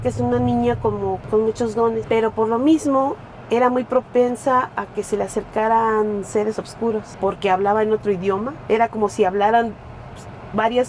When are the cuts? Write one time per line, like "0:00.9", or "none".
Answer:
0:01.2
0:02.0
0:07.1